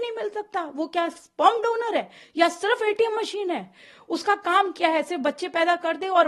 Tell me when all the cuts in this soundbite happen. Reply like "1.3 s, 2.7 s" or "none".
none